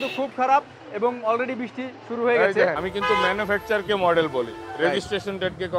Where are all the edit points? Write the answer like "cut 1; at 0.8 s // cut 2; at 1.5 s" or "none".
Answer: cut 1; at 2.8 s